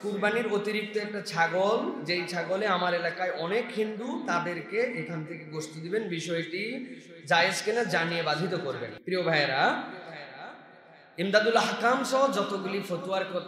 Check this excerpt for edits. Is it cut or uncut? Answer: uncut